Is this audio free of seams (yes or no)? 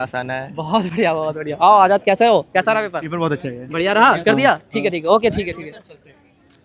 yes